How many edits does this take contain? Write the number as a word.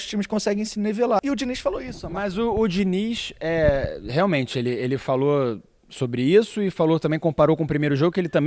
one